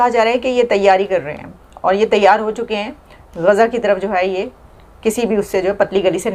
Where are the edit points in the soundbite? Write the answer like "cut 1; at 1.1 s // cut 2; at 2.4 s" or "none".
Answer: none